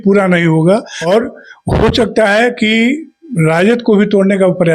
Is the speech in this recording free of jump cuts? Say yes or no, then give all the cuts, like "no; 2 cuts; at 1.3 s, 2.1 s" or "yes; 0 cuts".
no; 1 cut; at 0.9 s